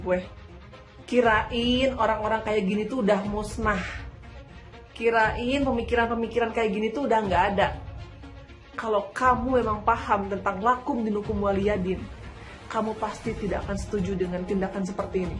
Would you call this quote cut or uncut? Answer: uncut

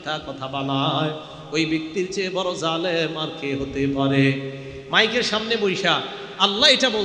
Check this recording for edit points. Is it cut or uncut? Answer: uncut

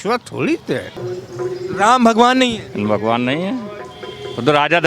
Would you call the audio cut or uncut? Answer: cut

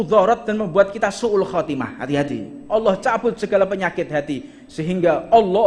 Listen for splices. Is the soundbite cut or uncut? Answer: cut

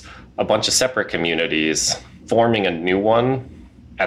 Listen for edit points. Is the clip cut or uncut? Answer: cut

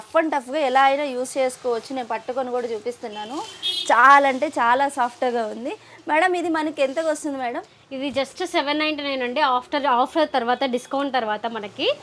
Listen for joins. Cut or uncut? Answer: uncut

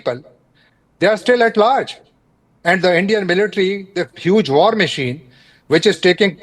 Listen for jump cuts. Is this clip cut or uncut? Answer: uncut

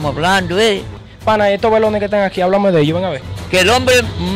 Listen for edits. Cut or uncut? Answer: cut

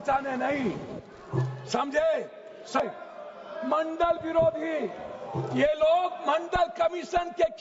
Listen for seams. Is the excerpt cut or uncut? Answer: cut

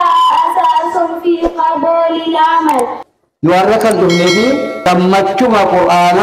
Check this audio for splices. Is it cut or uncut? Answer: cut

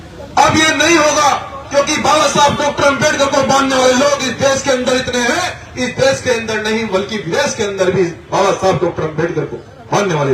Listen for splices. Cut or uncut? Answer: uncut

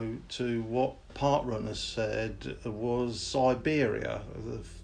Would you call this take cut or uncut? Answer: cut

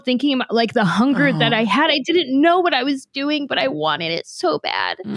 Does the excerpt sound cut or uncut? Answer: uncut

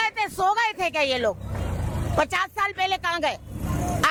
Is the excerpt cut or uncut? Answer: uncut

